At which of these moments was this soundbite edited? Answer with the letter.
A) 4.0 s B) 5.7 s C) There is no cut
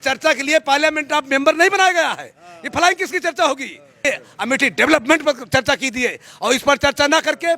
A